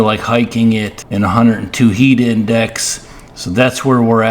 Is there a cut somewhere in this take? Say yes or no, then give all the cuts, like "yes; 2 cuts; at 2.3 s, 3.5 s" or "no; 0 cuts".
yes; 1 cut; at 1.0 s